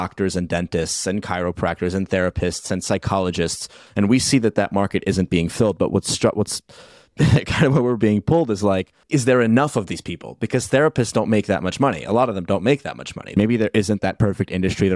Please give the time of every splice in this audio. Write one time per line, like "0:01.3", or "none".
0:03.8
0:09.0
0:13.3